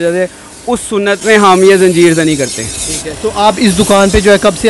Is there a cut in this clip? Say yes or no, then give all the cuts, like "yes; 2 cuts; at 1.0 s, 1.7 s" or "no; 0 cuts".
no; 0 cuts